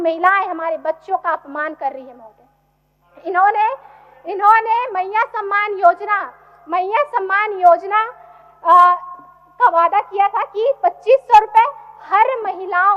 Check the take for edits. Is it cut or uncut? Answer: uncut